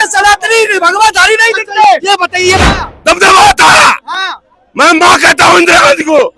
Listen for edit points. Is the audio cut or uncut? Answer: cut